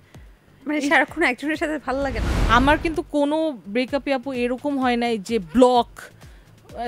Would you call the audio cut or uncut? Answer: cut